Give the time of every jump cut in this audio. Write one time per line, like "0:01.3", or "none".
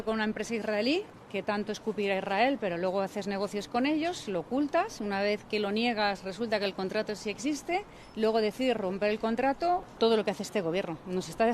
0:01.2
0:08.0
0:09.9